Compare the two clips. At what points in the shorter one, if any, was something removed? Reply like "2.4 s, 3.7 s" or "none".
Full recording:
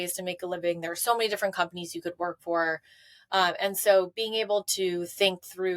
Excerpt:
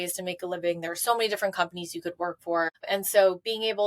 2.8 s